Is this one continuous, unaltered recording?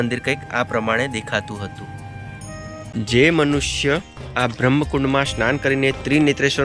no; 1 cut; at 2.9 s

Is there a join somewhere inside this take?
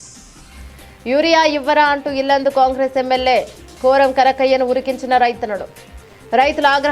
yes; 1 cut; at 1.0 s

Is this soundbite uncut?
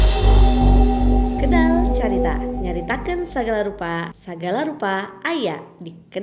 no; 1 cut; at 2.6 s

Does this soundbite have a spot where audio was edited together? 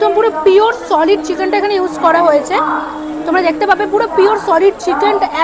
no; 0 cuts

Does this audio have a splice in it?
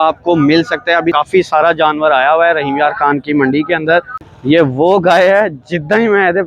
yes; 2 cuts; at 1.1 s, 4.2 s

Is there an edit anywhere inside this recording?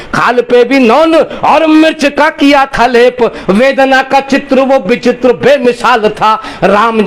no; 0 cuts

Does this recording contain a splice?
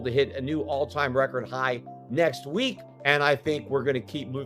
yes; 1 cut; at 2.9 s

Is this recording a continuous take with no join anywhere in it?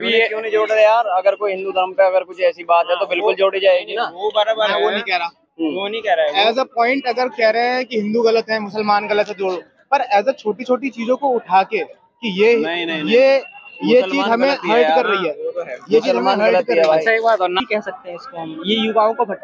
no; 1 cut; at 17.6 s

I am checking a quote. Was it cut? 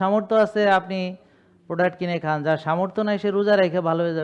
no; 0 cuts

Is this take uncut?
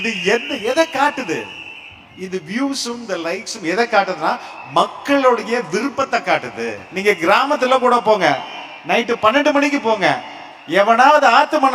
no; 1 cut; at 6.8 s

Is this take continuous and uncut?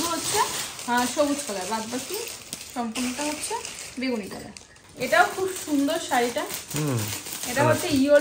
yes; 0 cuts

